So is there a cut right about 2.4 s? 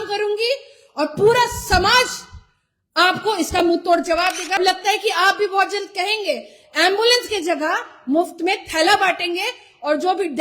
no; 1 cut; at 4.6 s

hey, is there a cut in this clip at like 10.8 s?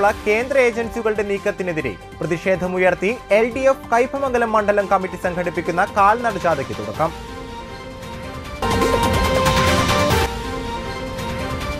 no; 0 cuts

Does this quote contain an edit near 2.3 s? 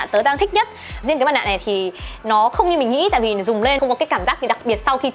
no; 2 cuts; at 1.0 s, 3.8 s

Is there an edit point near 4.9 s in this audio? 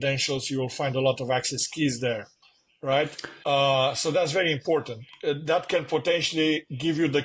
no; 1 cut; at 3.3 s

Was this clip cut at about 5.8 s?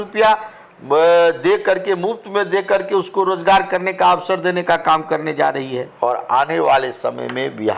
yes; 1 cut; at 5.8 s

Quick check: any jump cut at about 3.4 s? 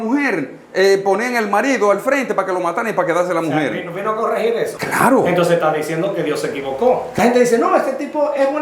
no; 2 cuts; at 4.8 s, 7.1 s

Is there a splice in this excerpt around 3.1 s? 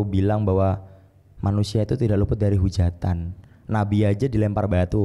no; 0 cuts

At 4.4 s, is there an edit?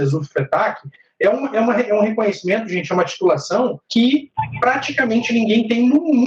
yes; 2 cuts; at 3.8 s, 4.4 s

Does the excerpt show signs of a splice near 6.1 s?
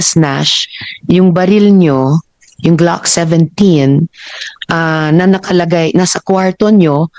no; 0 cuts

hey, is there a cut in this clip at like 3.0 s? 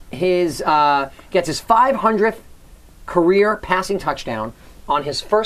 yes; 1 cut; at 3.0 s

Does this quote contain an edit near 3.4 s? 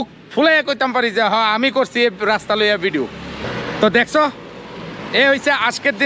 yes; 1 cut; at 3.4 s

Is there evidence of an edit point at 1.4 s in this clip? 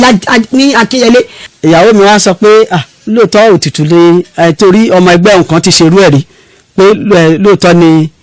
yes; 1 cut; at 1.4 s

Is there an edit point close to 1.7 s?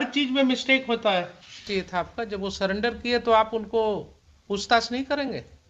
yes; 1 cut; at 1.7 s

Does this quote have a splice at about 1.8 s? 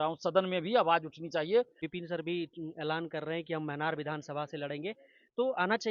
yes; 1 cut; at 1.8 s

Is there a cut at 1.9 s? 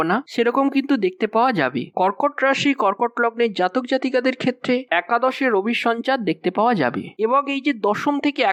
no; 0 cuts

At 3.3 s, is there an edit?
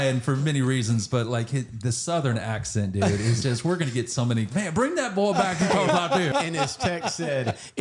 no; 2 cuts; at 4.5 s, 6.3 s

